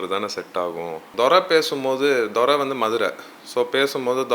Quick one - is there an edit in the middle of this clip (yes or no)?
yes